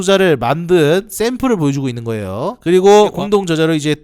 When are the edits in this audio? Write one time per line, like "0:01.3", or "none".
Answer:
none